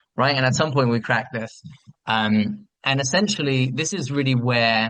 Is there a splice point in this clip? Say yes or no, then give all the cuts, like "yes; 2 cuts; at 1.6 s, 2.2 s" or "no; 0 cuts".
no; 0 cuts